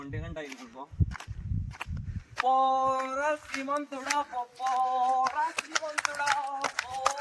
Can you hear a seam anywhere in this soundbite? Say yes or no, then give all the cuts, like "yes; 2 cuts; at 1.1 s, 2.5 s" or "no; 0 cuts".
no; 0 cuts